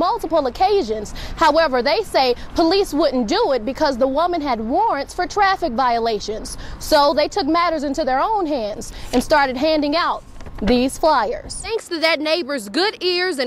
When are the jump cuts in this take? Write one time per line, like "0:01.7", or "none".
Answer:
0:11.5